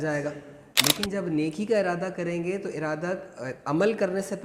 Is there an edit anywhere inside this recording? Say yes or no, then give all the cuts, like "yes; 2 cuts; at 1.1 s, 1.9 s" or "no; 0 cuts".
no; 0 cuts